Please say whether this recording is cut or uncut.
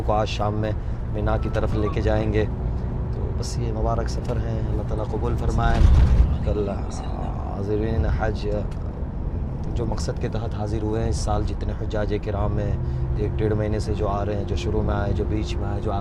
uncut